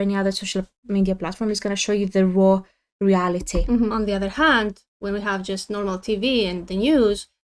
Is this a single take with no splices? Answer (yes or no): no